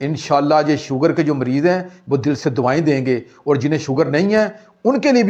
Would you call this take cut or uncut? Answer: uncut